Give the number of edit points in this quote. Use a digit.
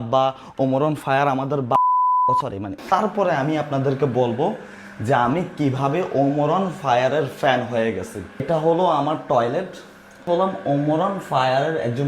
2